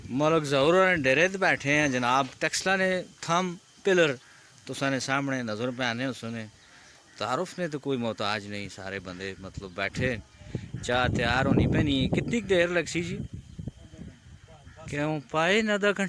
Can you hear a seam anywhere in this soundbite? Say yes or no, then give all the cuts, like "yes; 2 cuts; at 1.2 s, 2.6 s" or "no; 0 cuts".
no; 0 cuts